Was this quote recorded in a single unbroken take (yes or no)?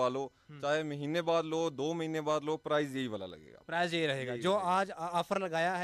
yes